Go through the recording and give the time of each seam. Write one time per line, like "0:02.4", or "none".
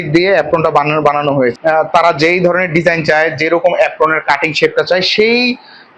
0:01.6